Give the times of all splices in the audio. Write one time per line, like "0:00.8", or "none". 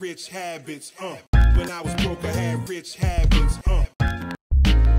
none

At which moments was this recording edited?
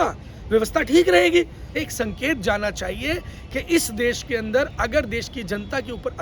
0:01.7

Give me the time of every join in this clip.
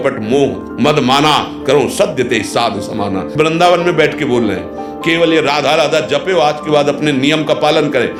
none

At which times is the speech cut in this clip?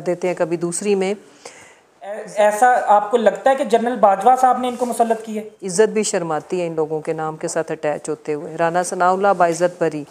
0:02.2
0:05.6

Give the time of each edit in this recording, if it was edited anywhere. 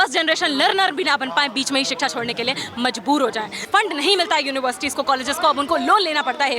0:03.6

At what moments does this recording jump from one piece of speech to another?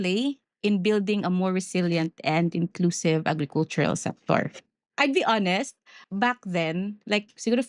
0:04.9
0:06.0

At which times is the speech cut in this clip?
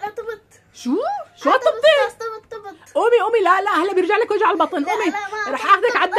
none

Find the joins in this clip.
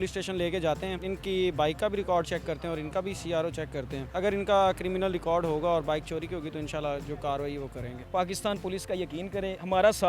0:01.0
0:04.0
0:08.0

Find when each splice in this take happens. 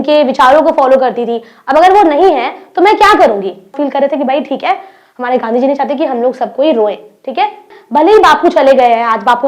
0:03.7
0:07.8

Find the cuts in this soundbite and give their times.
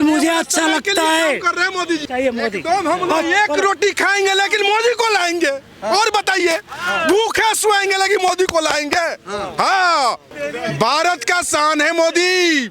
0:02.0
0:10.3

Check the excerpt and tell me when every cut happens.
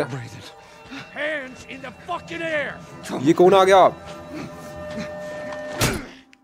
none

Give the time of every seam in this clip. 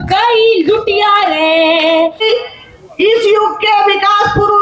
0:02.2

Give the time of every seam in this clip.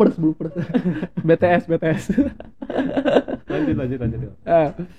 none

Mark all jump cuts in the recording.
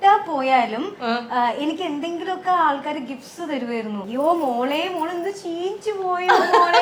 none

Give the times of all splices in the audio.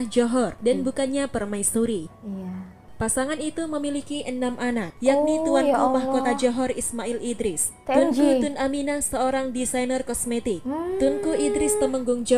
none

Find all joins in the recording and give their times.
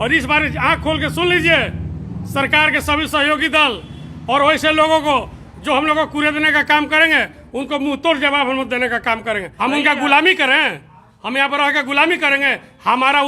0:09.5

